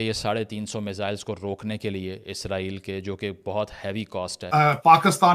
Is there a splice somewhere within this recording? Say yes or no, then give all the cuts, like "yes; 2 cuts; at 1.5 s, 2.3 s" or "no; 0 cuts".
yes; 1 cut; at 4.4 s